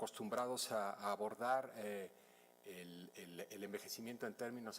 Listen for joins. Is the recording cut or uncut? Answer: cut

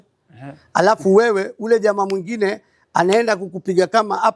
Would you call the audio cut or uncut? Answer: uncut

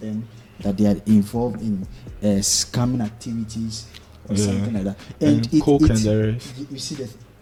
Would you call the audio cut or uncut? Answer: uncut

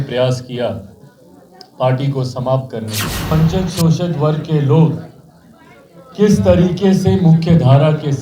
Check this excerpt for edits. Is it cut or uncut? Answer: cut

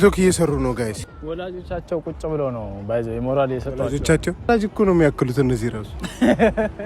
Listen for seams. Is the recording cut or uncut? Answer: cut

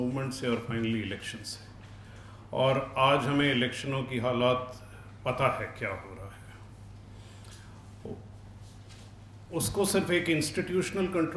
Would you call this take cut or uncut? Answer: uncut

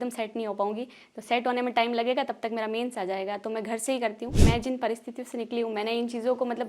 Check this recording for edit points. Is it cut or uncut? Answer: cut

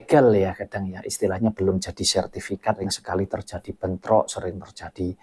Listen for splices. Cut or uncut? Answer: cut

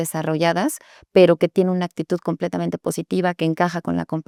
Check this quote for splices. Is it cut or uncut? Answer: uncut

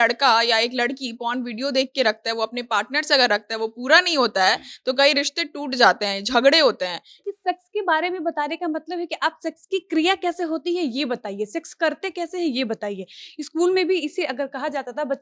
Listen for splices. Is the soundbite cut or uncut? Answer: cut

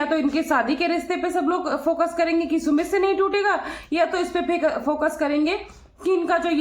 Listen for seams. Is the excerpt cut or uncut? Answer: uncut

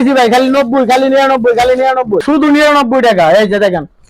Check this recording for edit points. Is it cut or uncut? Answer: cut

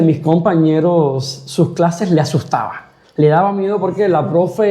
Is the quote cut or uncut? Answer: uncut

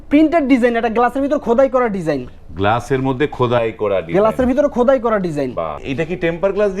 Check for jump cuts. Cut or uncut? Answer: cut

